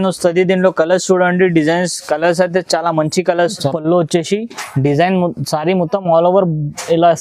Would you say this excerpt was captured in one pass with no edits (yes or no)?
no